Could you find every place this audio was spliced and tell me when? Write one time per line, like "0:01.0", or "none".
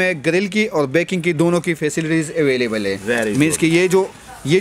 none